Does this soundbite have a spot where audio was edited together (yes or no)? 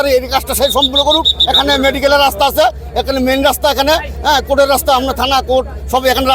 no